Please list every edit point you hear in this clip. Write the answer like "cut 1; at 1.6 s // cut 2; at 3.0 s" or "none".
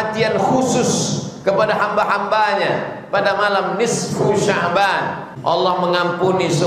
cut 1; at 5.3 s